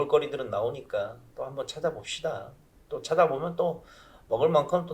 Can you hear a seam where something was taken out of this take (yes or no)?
yes